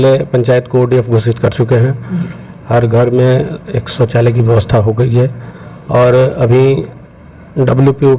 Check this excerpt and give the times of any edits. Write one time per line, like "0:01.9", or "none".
none